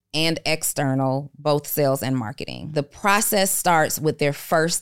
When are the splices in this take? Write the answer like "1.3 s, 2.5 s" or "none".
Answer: 2.6 s